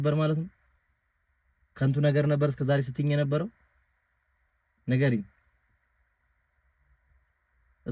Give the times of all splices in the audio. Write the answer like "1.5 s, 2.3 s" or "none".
none